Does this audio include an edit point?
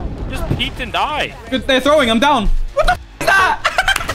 yes; 1 cut; at 1.4 s

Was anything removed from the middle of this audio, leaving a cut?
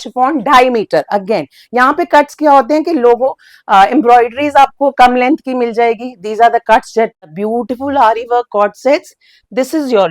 yes; 1 cut; at 7.3 s

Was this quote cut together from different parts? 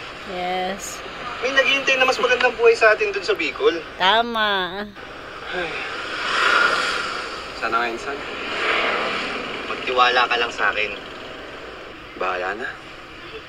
no; 0 cuts

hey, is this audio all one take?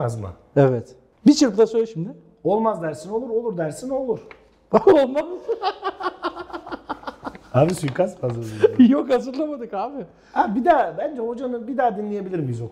yes; 0 cuts

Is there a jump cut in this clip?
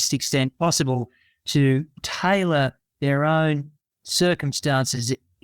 yes; 1 cut; at 2.0 s

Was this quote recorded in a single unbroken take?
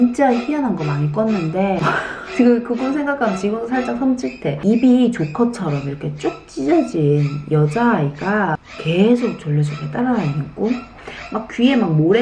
no; 2 cuts; at 8.7 s, 10.9 s

